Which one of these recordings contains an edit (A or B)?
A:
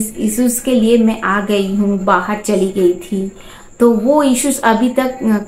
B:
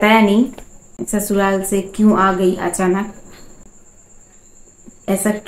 B